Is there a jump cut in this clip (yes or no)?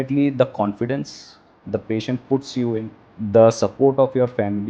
yes